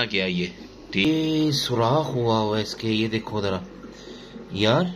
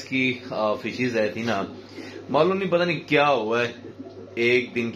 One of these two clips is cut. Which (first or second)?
first